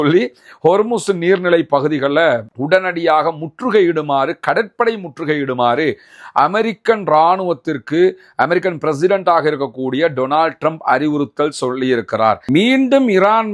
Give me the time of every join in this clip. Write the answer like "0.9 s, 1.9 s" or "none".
12.4 s